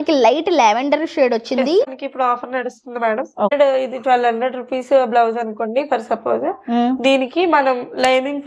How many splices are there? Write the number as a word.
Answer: two